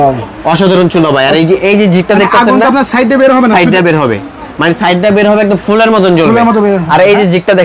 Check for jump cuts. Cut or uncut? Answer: uncut